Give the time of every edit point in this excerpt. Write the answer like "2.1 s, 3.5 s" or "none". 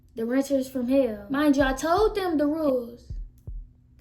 1.2 s